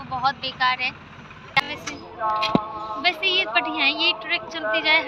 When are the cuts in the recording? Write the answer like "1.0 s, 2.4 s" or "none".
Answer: 1.7 s